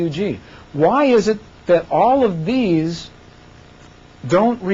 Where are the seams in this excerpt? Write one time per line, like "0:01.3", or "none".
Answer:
none